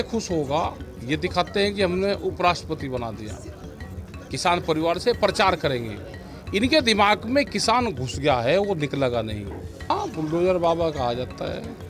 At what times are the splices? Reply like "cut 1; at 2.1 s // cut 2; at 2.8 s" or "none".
cut 1; at 9.9 s